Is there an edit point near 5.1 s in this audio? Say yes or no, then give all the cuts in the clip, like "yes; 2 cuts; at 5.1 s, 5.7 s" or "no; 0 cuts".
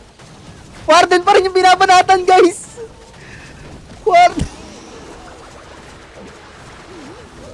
no; 0 cuts